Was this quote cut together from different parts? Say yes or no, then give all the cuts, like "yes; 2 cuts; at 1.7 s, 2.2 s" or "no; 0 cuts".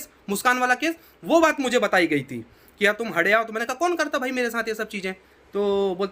no; 0 cuts